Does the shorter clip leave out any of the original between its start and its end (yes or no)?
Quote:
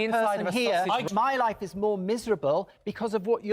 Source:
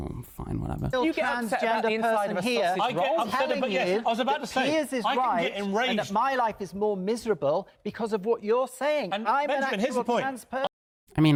yes